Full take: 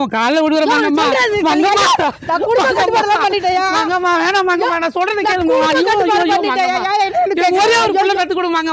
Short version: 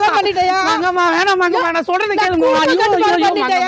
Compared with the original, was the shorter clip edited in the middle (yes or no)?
no